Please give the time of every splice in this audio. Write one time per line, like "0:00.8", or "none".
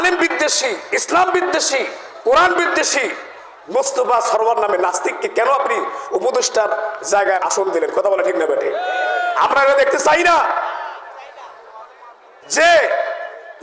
0:07.4